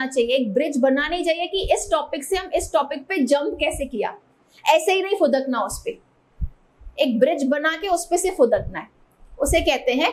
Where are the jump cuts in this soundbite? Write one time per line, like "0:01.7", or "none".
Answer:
none